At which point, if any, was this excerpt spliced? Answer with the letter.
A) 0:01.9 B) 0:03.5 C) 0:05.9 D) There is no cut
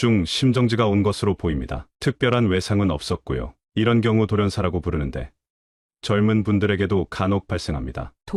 D